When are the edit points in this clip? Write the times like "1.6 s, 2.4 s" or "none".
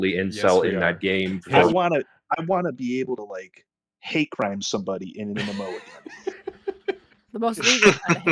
1.7 s

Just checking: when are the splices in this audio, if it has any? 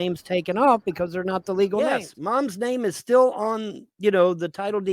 1.8 s

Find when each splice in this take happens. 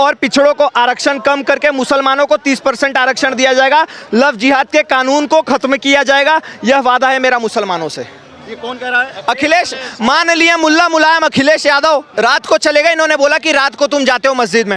12.1 s

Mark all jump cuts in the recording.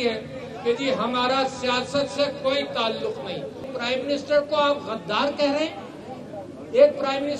3.7 s

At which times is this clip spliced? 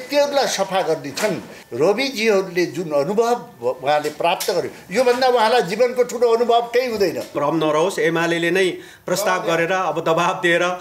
1.6 s, 7.4 s

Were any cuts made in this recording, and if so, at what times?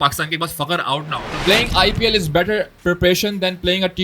1.4 s

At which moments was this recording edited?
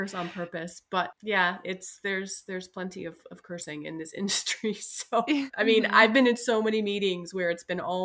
1.1 s, 5.5 s

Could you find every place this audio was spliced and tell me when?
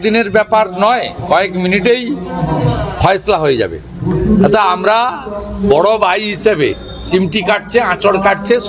none

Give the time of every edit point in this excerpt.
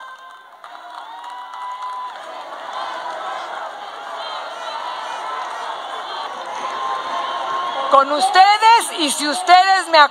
6.3 s

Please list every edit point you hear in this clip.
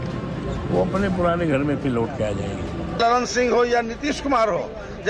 3.0 s

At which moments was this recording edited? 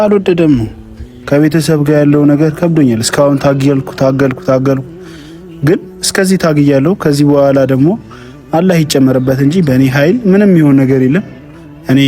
1.2 s

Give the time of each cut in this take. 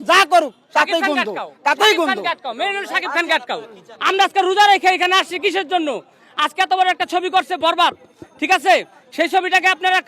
none

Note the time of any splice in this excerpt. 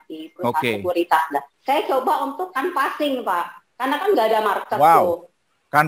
1.5 s

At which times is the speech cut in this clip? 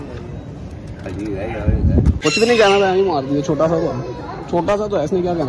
2.2 s

